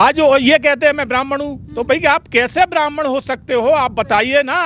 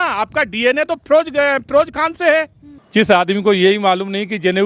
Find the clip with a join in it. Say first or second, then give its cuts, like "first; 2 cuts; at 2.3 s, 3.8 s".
second; 1 cut; at 2.7 s